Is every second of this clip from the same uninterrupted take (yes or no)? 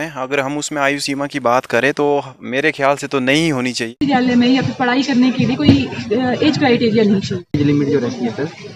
no